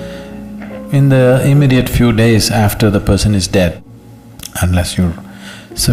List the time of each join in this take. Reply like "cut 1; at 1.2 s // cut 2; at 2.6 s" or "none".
cut 1; at 3.8 s